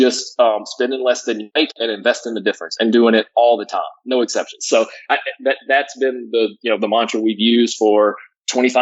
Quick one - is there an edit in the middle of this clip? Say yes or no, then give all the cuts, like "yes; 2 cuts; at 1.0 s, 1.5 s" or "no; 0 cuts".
yes; 1 cut; at 1.4 s